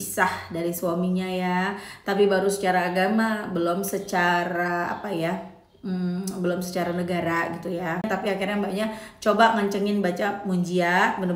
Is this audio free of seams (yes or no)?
no